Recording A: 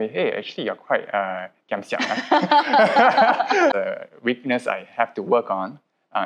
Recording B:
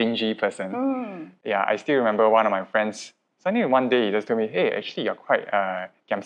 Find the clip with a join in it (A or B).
A